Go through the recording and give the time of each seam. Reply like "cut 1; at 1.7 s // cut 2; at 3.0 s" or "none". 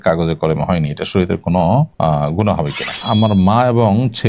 cut 1; at 1.9 s // cut 2; at 2.9 s